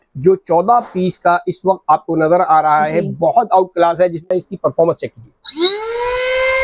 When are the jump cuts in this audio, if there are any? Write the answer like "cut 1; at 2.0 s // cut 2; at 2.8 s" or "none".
cut 1; at 4.2 s